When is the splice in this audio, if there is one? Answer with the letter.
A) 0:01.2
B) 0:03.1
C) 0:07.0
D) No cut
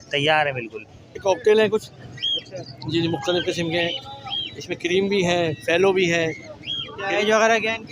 A